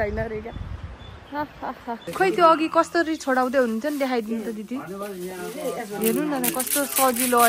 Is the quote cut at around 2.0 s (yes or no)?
yes